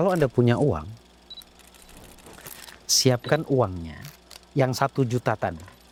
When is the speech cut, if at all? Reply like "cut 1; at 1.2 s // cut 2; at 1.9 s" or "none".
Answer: none